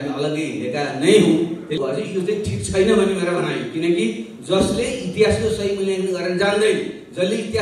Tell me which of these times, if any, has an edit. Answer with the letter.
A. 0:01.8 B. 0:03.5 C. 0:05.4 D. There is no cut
A